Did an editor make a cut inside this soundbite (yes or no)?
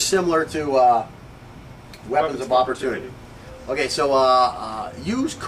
yes